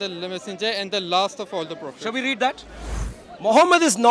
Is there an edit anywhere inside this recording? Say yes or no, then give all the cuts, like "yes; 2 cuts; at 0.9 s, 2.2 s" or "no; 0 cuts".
yes; 1 cut; at 2.7 s